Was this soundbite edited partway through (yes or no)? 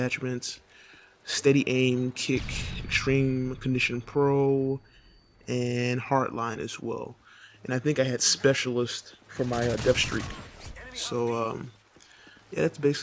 no